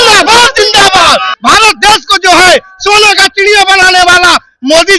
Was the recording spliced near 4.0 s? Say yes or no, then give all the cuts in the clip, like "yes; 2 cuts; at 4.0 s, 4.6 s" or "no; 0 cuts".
no; 1 cut; at 1.3 s